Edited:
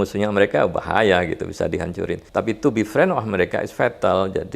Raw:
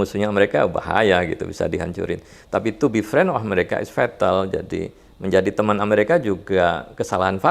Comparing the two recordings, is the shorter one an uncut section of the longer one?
no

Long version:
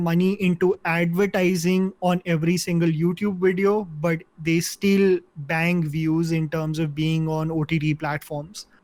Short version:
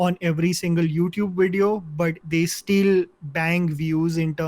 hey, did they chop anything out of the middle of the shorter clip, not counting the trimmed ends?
yes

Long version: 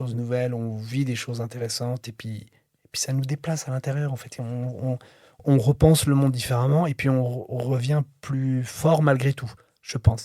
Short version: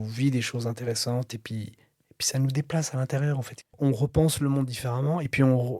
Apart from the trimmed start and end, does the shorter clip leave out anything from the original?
yes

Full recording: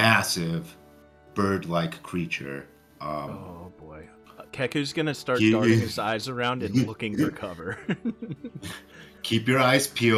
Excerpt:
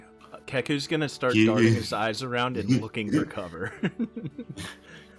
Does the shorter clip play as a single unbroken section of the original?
yes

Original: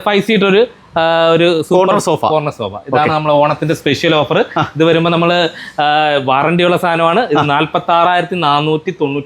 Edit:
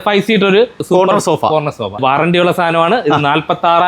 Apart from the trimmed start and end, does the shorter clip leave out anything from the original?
yes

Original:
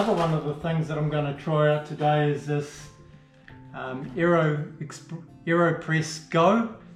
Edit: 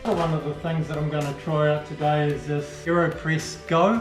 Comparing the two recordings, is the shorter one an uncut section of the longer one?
no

